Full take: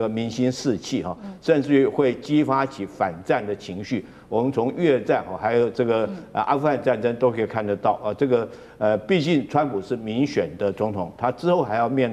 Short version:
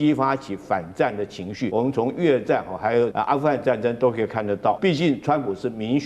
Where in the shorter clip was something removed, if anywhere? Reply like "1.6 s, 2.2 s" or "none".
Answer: 1.7 s, 3.1 s, 4.8 s